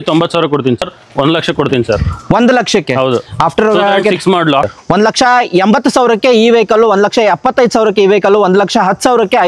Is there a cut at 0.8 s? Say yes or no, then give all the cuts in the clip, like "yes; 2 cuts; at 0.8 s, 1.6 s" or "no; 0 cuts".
yes; 2 cuts; at 0.8 s, 4.7 s